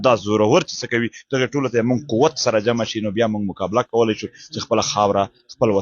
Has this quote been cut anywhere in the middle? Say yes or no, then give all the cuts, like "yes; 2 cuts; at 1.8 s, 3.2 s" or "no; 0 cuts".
no; 0 cuts